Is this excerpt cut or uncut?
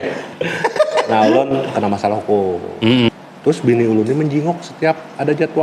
cut